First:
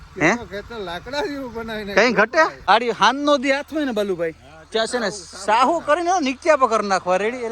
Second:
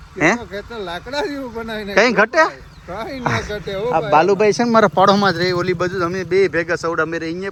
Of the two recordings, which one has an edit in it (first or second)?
first